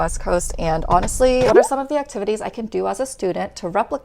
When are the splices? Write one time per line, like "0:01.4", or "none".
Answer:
0:01.5